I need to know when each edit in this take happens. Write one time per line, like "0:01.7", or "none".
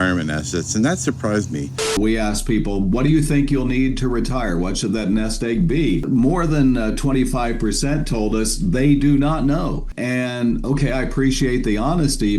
0:02.0
0:06.0